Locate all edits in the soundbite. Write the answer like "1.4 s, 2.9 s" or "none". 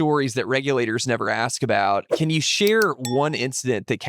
2.1 s